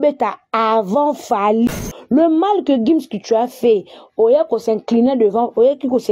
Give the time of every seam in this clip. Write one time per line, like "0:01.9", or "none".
0:01.7